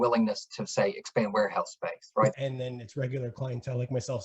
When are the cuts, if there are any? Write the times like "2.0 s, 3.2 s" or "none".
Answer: 2.4 s

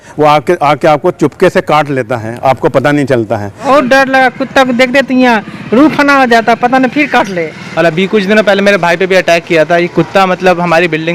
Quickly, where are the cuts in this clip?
3.5 s, 7.6 s

